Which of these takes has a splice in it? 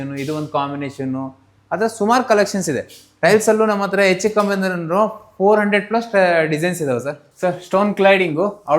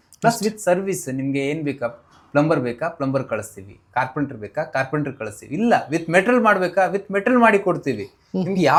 first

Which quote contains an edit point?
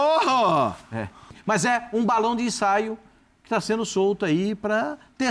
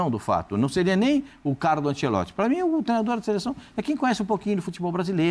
first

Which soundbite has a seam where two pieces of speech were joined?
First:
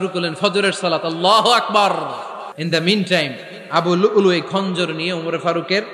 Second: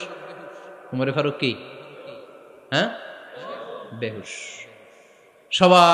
first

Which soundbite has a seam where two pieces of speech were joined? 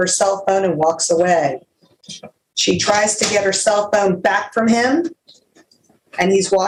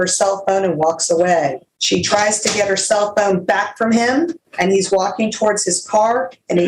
second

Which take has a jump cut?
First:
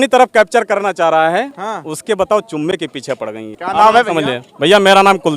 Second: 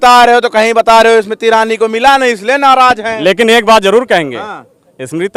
first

